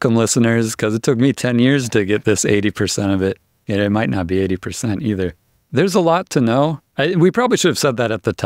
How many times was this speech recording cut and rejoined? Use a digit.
0